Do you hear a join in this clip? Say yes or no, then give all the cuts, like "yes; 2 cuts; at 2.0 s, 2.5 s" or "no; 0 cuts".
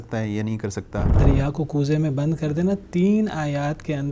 yes; 1 cut; at 1.1 s